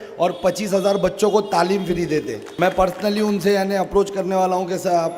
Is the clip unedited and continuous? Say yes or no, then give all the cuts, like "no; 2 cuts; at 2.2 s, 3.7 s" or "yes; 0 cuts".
no; 1 cut; at 2.4 s